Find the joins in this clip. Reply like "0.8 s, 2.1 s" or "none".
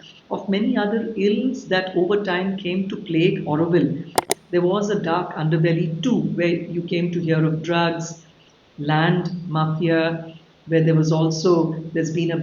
4.3 s